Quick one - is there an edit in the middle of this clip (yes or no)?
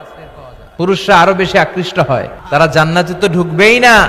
yes